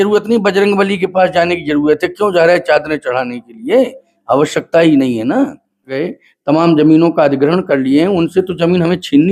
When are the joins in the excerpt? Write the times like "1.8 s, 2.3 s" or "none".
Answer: 6.0 s